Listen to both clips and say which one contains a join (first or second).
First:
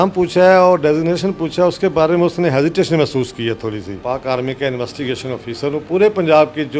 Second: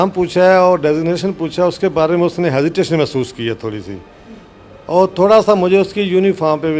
first